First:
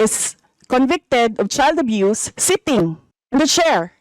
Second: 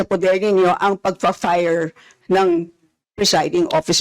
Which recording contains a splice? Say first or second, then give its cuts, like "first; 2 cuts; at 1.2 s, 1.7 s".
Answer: first; 1 cut; at 3.1 s